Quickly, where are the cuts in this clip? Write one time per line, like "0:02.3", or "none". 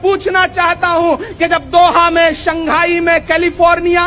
none